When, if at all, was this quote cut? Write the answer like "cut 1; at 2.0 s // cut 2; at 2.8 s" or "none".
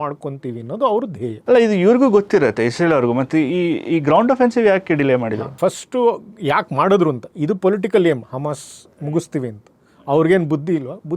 none